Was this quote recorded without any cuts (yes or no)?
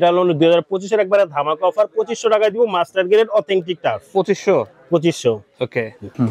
yes